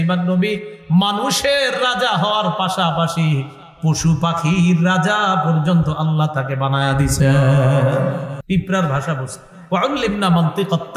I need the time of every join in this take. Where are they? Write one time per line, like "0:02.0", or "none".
0:08.3